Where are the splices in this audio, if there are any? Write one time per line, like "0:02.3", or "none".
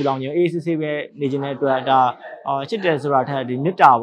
none